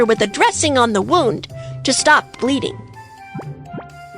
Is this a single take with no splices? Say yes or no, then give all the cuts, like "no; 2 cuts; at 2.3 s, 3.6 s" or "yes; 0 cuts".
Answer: no; 1 cut; at 2.8 s